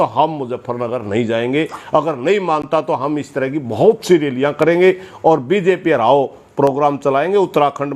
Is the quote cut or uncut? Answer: uncut